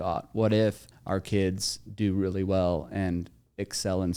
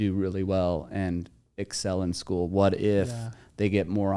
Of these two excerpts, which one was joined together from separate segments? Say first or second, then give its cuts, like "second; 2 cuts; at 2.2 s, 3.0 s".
first; 1 cut; at 0.9 s